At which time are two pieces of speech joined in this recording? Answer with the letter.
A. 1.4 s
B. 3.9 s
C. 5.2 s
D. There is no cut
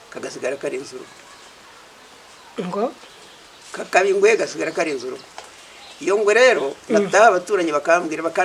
D